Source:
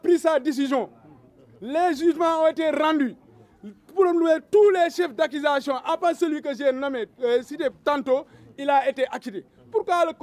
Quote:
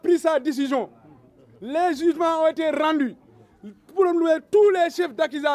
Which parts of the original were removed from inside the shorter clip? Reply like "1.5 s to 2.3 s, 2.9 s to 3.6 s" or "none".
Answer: none